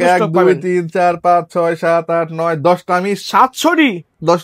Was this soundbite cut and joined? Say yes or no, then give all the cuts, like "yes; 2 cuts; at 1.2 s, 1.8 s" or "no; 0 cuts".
no; 0 cuts